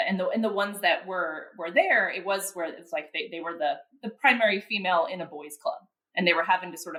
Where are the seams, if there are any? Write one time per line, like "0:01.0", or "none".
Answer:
none